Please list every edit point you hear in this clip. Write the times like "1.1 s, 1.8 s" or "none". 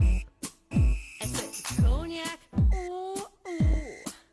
none